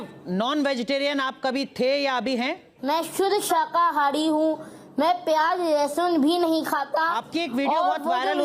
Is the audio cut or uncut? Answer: cut